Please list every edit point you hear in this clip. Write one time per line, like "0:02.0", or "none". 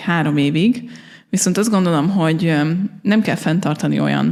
none